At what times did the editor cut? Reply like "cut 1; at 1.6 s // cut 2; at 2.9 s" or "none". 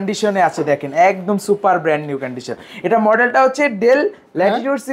none